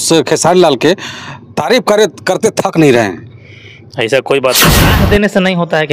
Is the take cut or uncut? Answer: cut